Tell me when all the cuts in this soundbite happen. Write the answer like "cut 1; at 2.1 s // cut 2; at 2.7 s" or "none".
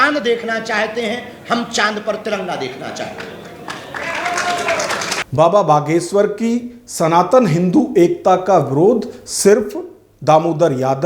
none

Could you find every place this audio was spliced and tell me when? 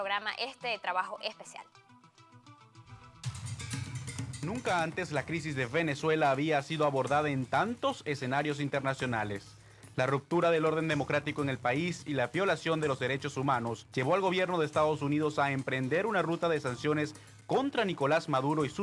cut 1; at 10.1 s

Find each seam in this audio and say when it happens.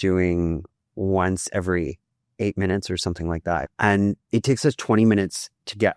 cut 1; at 3.7 s

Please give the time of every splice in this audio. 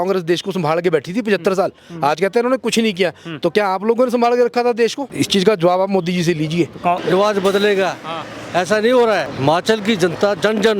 cut 1; at 5.0 s // cut 2; at 7.0 s // cut 3; at 9.3 s

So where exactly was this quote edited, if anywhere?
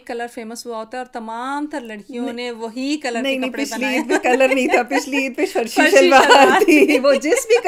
none

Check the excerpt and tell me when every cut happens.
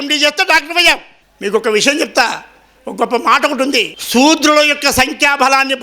cut 1; at 1.1 s // cut 2; at 4.0 s

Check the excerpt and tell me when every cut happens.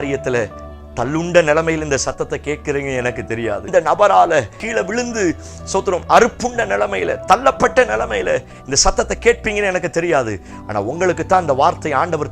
cut 1; at 3.6 s // cut 2; at 4.6 s

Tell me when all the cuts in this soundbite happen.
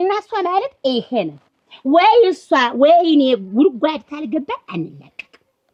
none

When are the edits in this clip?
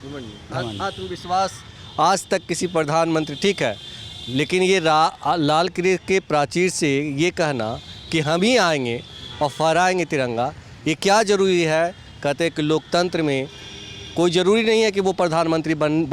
none

